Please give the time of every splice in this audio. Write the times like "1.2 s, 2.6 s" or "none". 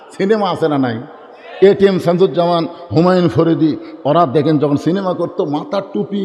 none